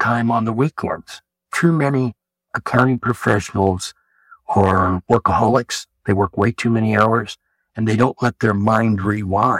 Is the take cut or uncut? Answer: uncut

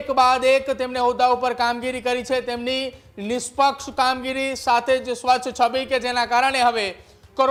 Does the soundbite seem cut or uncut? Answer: uncut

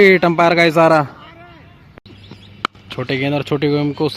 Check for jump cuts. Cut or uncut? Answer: cut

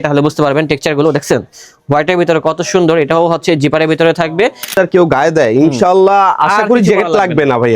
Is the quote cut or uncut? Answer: cut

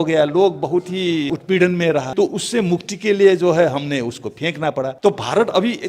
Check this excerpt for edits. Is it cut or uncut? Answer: cut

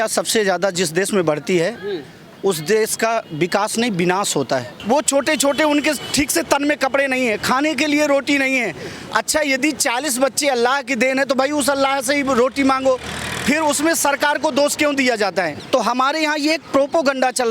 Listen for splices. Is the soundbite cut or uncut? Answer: cut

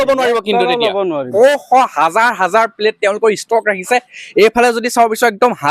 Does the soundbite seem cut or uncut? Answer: cut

